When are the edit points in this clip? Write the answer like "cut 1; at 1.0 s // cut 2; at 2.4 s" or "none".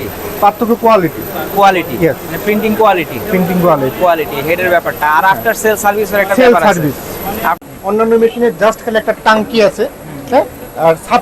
cut 1; at 7.6 s